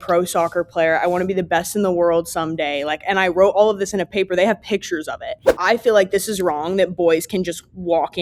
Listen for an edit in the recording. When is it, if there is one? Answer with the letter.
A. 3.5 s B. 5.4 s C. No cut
B